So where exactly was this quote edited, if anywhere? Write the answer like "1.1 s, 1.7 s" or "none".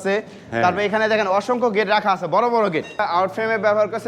3.0 s